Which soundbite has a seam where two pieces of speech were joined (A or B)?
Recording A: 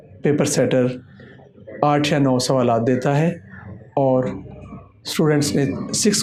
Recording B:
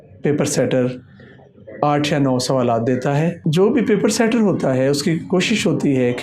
B